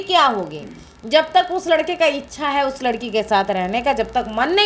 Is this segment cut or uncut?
uncut